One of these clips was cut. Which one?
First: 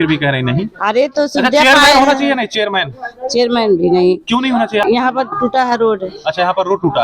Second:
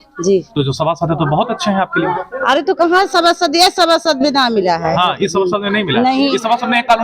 first; 1 cut; at 4.8 s

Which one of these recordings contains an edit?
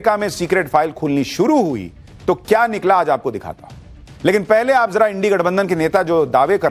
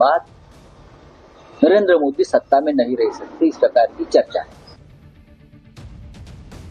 second; 1 cut; at 2.4 s

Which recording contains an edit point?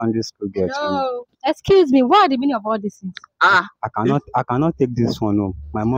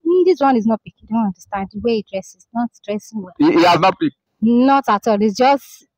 second; 1 cut; at 0.9 s

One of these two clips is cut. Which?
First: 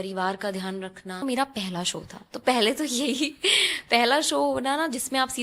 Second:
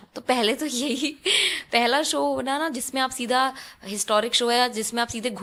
first; 1 cut; at 1.2 s

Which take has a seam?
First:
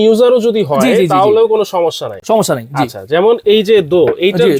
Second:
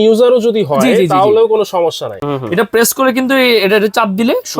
second; 1 cut; at 2.1 s

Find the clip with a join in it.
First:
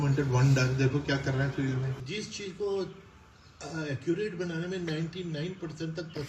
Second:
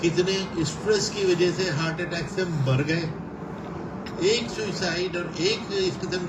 first; 1 cut; at 2.0 s

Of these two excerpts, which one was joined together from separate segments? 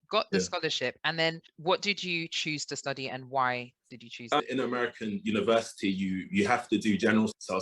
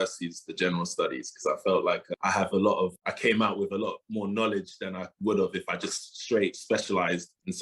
first; 1 cut; at 4.4 s

